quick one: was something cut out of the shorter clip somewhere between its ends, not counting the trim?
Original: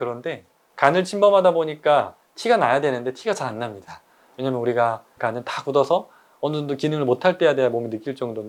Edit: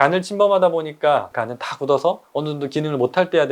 yes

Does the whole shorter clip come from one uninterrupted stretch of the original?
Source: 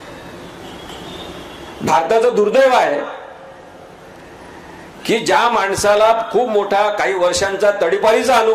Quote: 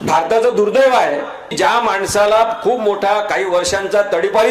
no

